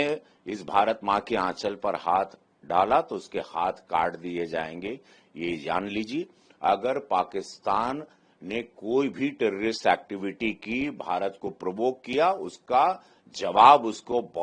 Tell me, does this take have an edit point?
no; 0 cuts

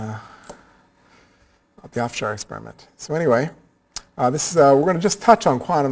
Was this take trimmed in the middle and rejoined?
yes; 1 cut; at 2.9 s

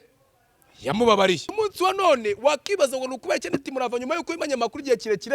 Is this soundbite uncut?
no; 1 cut; at 1.5 s

